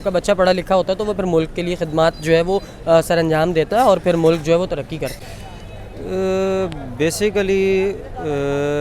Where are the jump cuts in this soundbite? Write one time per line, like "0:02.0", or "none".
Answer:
0:05.3